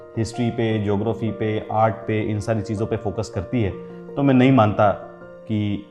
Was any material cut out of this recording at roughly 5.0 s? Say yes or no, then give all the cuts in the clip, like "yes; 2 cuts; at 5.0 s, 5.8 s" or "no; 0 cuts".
no; 0 cuts